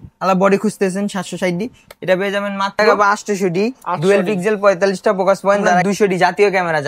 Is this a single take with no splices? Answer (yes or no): no